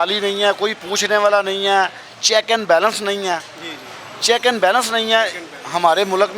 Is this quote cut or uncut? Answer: uncut